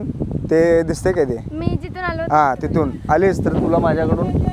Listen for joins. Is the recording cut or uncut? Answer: uncut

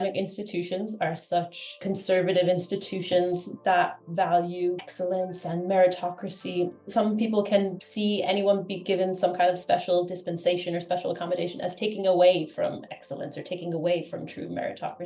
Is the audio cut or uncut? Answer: cut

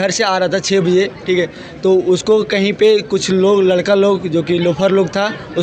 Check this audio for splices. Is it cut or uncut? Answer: uncut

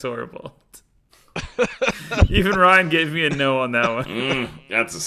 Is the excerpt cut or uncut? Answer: uncut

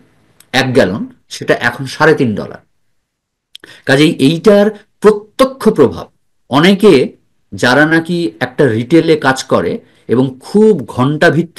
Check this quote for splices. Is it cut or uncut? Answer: uncut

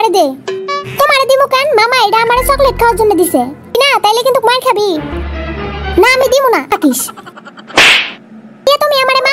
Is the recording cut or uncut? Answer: cut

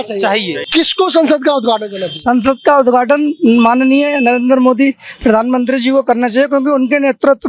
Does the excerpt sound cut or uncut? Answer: uncut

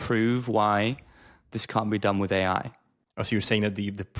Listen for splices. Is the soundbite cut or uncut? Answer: cut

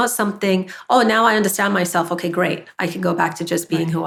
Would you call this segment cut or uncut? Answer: uncut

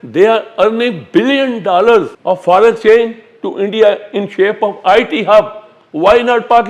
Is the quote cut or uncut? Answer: cut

